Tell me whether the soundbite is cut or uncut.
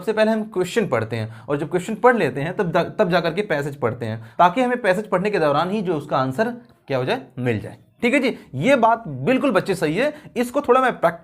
uncut